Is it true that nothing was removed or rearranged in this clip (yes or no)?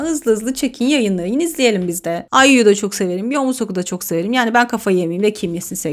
yes